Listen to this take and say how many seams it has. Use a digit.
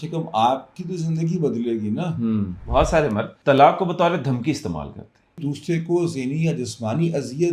3